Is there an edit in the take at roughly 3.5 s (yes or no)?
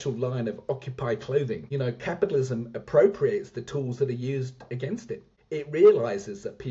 no